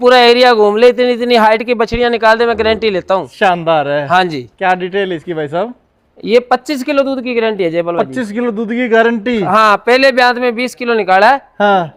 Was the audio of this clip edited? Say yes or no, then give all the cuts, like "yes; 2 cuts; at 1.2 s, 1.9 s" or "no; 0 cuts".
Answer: no; 0 cuts